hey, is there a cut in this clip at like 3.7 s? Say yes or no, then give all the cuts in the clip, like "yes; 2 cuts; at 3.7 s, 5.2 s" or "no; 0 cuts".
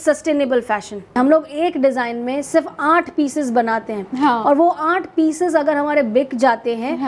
no; 1 cut; at 1.2 s